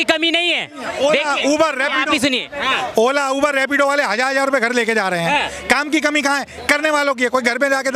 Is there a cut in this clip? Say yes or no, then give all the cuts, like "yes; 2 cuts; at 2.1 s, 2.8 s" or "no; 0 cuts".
no; 0 cuts